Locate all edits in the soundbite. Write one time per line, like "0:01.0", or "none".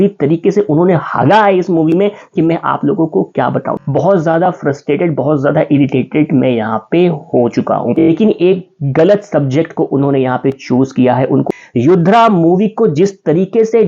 0:03.8
0:08.0
0:11.5

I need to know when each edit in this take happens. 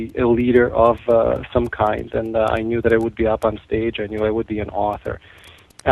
0:05.0

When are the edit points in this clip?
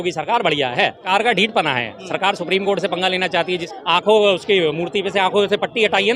0:01.1
0:03.7

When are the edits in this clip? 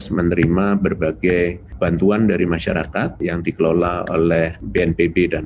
0:01.6
0:03.2
0:04.6

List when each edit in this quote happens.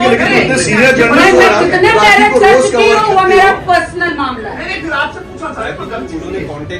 none

